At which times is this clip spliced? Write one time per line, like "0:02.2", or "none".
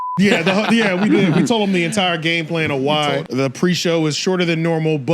0:03.3